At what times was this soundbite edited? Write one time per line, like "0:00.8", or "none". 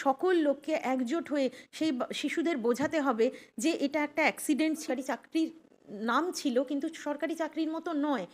0:04.8